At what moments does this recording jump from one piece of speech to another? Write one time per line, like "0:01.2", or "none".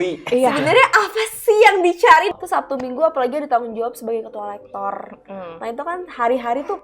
0:02.3